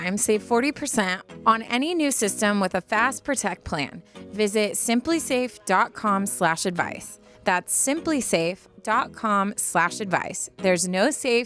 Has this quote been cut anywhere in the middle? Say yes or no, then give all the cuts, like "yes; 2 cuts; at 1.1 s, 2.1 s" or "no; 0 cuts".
no; 0 cuts